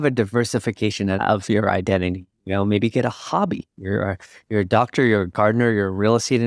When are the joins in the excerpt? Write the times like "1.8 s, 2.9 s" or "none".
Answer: 1.2 s